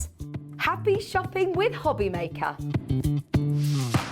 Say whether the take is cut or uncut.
uncut